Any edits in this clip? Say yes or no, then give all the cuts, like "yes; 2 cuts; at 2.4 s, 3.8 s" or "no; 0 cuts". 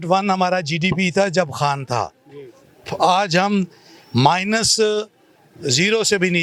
no; 0 cuts